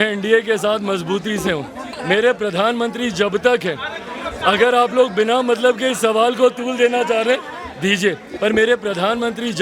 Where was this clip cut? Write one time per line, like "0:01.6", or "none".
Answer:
0:01.9
0:08.3